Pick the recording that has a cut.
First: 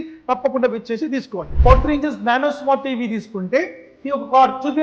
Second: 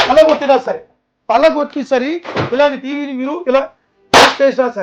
first; 1 cut; at 1.4 s

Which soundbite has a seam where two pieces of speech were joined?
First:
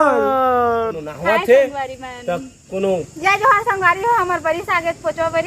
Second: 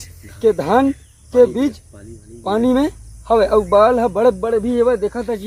first; 1 cut; at 1.2 s

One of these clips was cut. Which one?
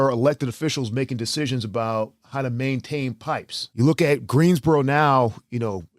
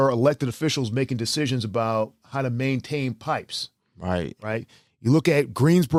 first; 1 cut; at 3.6 s

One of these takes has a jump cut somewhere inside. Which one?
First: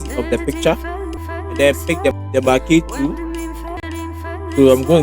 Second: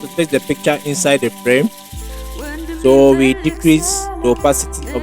first; 3 cuts; at 1.2 s, 2.2 s, 3.7 s

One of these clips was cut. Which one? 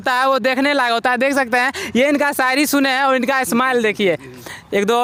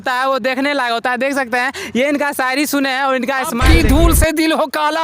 second; 1 cut; at 3.6 s

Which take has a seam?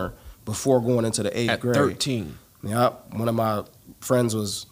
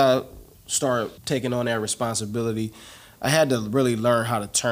second; 1 cut; at 1.2 s

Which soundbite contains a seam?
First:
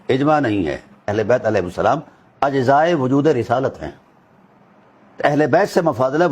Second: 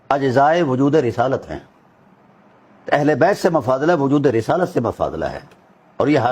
first; 1 cut; at 1.1 s

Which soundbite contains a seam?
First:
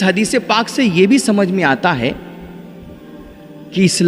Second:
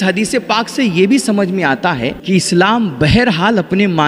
second; 1 cut; at 2.2 s

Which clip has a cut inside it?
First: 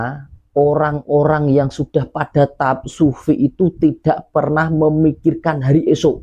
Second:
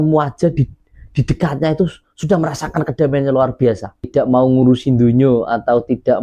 second; 1 cut; at 4.1 s

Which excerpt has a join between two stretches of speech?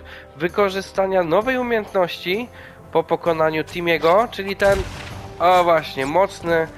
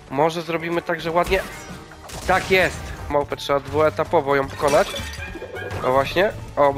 second; 1 cut; at 3.1 s

